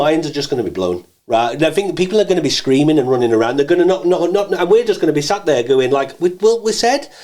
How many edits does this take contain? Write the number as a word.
zero